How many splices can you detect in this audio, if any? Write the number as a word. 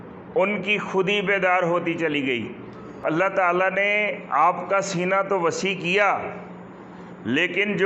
one